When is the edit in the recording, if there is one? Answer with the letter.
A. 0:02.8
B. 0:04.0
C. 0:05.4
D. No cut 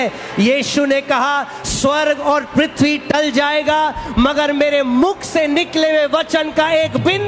D